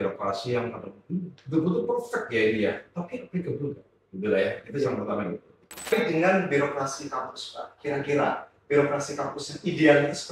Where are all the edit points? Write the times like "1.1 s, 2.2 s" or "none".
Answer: 5.9 s

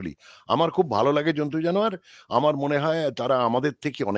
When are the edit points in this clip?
none

